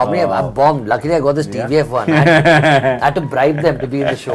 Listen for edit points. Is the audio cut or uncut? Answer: uncut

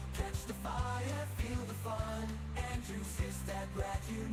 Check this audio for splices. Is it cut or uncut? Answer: uncut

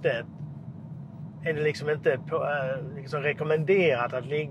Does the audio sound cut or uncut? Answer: uncut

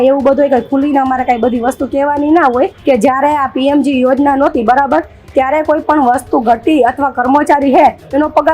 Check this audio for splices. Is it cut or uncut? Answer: cut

